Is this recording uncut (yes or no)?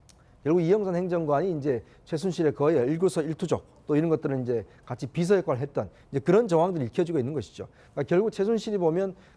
yes